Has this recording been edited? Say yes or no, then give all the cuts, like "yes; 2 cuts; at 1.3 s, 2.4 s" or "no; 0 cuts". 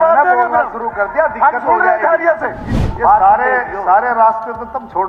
yes; 1 cut; at 2.8 s